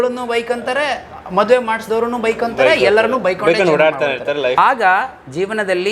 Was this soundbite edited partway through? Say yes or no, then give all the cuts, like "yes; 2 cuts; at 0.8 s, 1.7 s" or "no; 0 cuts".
yes; 1 cut; at 4.6 s